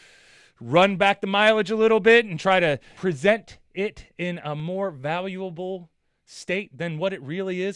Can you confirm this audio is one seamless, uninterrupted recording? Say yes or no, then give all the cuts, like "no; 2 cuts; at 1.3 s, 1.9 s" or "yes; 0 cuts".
no; 1 cut; at 2.9 s